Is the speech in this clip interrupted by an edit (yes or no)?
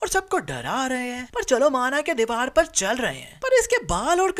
no